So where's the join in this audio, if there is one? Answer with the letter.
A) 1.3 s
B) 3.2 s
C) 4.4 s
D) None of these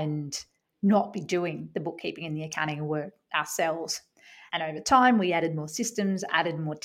C